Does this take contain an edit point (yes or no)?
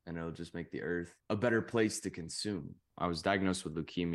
yes